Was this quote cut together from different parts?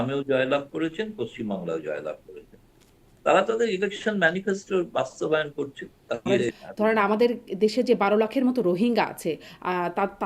yes; 1 cut; at 6.2 s

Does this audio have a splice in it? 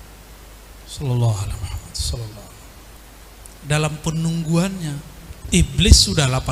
no; 0 cuts

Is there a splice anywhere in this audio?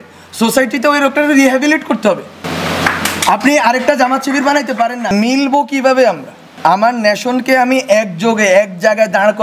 yes; 3 cuts; at 2.4 s, 5.1 s, 6.5 s

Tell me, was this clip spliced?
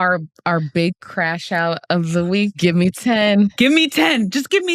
yes; 2 cuts; at 1.8 s, 3.0 s

